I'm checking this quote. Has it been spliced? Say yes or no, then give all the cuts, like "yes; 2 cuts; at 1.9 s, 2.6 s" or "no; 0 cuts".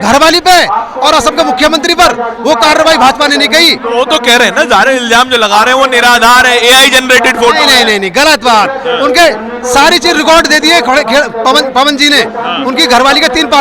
no; 0 cuts